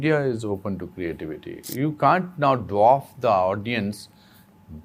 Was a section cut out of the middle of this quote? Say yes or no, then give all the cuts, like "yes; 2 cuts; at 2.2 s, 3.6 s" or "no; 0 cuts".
yes; 1 cut; at 1.7 s